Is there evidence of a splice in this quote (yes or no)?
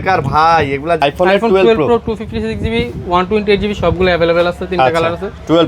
yes